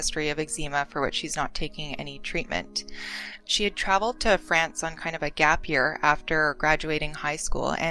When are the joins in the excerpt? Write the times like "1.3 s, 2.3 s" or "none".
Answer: 3.4 s